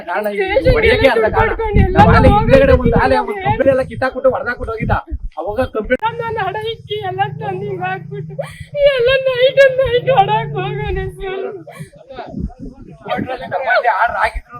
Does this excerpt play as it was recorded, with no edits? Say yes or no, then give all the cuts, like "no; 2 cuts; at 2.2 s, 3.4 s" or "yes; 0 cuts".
no; 1 cut; at 6.0 s